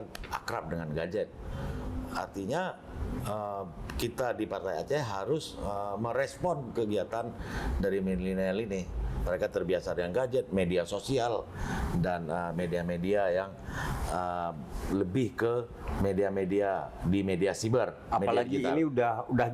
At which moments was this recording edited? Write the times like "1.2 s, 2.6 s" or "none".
none